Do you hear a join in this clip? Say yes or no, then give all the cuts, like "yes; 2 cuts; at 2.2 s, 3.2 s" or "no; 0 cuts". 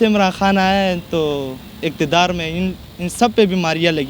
no; 0 cuts